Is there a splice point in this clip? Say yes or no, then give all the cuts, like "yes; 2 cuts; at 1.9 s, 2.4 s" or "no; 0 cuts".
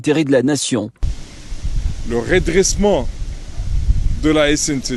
no; 0 cuts